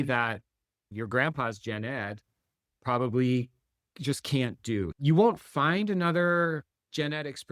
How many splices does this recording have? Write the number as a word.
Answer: zero